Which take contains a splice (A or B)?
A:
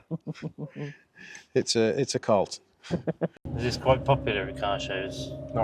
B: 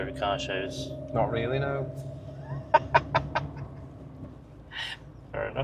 A